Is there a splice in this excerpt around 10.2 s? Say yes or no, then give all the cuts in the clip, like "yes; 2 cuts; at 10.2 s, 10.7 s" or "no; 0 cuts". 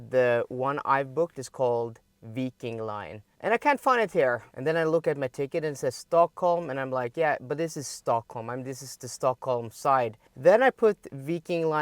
yes; 3 cuts; at 3.2 s, 4.5 s, 10.2 s